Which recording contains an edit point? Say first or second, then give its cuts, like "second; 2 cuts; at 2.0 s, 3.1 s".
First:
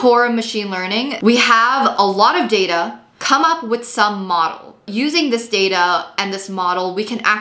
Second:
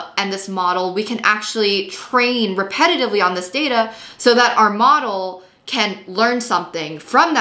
first; 3 cuts; at 1.1 s, 3.2 s, 4.8 s